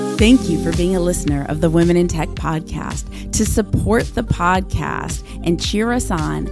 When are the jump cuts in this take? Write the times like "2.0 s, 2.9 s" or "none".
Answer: none